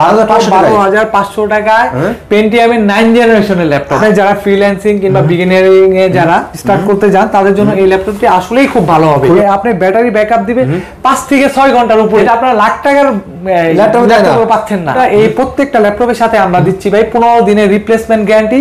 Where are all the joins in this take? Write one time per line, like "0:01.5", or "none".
0:04.0
0:09.4
0:12.2
0:14.9